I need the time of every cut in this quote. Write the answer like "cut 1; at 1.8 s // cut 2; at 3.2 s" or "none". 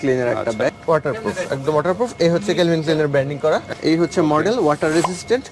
cut 1; at 0.8 s // cut 2; at 3.7 s